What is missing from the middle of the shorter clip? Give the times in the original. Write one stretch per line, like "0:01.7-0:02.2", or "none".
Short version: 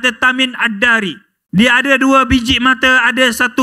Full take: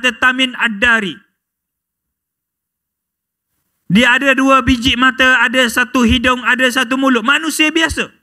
0:01.3-0:03.7